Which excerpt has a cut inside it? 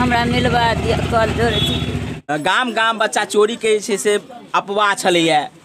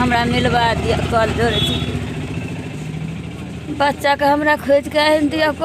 first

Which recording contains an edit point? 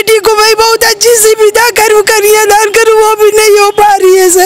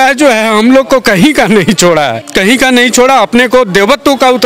second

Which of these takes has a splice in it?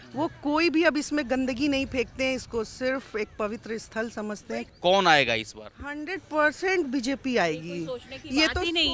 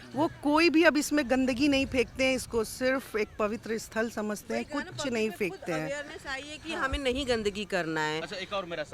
first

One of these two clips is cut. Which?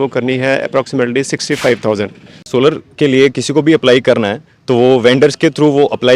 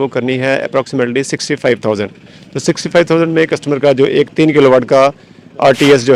first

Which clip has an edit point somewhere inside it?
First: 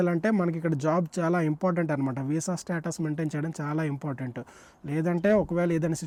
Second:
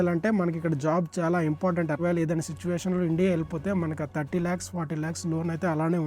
second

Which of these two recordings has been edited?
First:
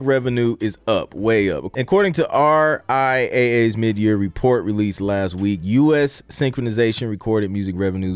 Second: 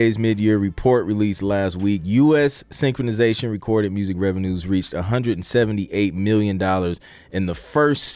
first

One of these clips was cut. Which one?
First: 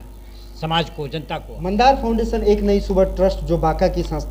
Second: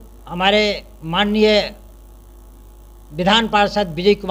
first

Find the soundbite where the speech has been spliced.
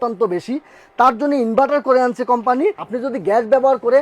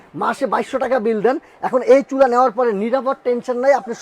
first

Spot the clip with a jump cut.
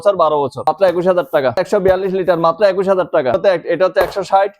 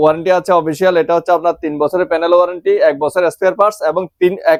first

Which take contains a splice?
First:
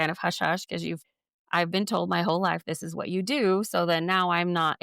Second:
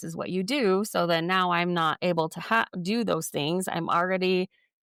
first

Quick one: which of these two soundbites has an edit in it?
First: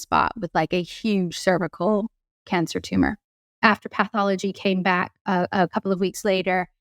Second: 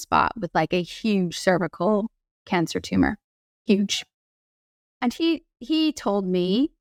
first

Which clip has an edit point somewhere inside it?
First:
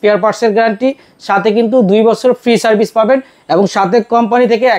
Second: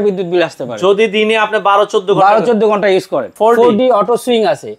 second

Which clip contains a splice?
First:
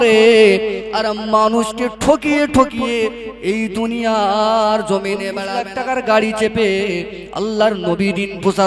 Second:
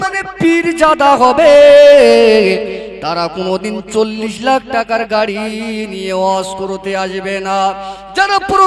first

